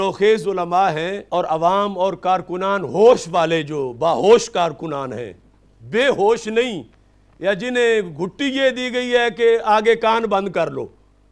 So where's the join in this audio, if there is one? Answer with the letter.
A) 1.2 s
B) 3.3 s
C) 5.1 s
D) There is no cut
A